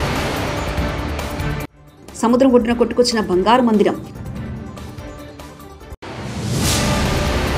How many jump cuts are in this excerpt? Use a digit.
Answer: 1